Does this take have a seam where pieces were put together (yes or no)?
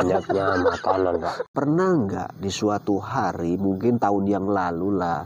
yes